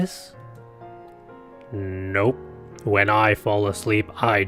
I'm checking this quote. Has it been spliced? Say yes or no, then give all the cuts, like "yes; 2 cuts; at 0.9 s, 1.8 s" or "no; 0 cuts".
no; 0 cuts